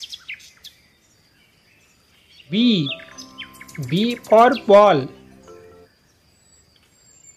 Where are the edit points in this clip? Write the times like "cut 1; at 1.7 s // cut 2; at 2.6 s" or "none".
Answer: cut 1; at 2.5 s // cut 2; at 5.8 s

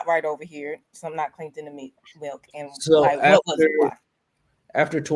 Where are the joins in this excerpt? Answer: none

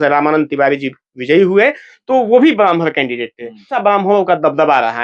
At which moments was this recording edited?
cut 1; at 3.7 s

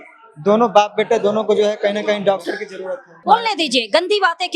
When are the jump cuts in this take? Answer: cut 1; at 3.2 s

